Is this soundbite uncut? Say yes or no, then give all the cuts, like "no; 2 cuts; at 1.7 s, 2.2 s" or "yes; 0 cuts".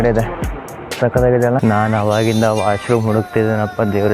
no; 1 cut; at 1.6 s